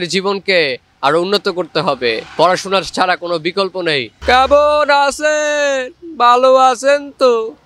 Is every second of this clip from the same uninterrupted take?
no; 1 cut; at 4.1 s

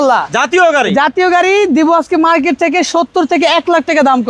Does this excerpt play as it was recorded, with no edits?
yes; 0 cuts

